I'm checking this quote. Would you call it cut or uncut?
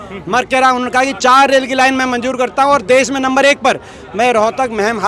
uncut